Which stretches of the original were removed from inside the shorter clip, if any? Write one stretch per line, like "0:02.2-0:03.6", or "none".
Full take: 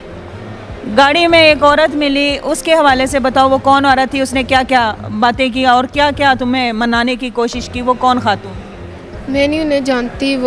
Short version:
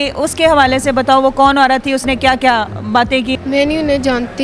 0:05.6-0:09.1